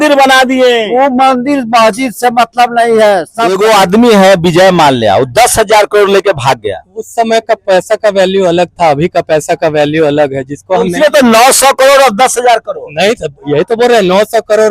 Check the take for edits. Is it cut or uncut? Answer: cut